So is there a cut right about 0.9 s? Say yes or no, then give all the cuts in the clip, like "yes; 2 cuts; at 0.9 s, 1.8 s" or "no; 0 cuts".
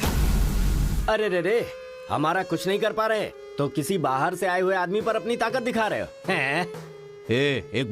yes; 1 cut; at 0.9 s